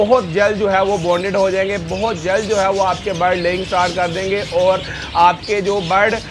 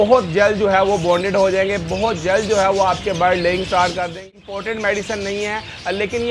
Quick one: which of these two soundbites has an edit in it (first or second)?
second